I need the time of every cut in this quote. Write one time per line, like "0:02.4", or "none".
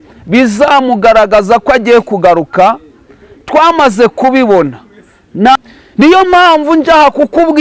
0:05.6